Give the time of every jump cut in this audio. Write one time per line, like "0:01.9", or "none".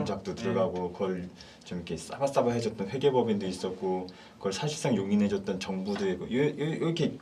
none